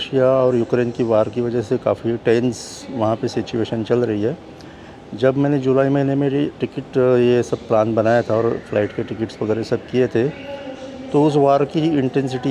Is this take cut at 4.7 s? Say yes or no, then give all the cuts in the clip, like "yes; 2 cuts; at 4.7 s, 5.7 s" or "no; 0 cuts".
no; 0 cuts